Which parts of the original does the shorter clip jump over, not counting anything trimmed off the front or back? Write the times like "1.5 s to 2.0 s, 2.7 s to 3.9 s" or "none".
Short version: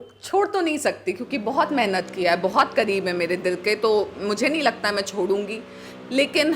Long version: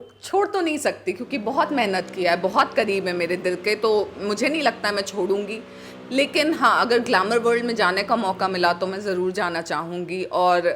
none